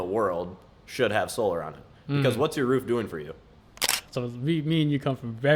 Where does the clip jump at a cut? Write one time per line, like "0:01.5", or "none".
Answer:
0:03.8